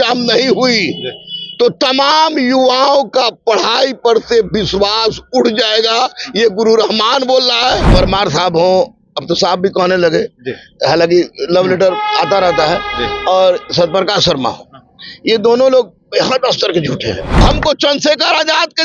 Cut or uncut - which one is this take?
cut